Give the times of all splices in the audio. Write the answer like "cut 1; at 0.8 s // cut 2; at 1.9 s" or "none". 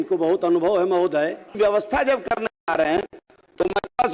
cut 1; at 1.4 s